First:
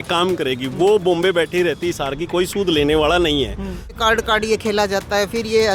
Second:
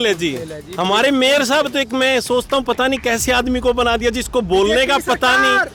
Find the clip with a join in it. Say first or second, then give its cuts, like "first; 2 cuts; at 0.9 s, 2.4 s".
first; 1 cut; at 4.0 s